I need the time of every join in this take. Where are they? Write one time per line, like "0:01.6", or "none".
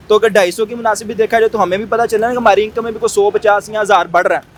none